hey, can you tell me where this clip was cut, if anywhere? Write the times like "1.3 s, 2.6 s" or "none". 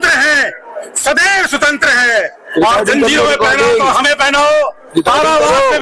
1.2 s